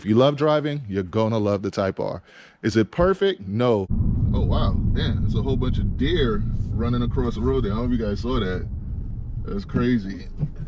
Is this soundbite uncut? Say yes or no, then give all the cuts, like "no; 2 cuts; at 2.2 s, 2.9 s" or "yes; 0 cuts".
no; 1 cut; at 3.9 s